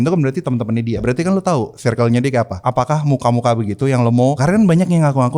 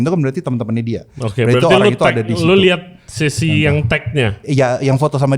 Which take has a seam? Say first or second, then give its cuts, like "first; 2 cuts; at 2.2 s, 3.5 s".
first; 3 cuts; at 1.0 s, 2.6 s, 4.4 s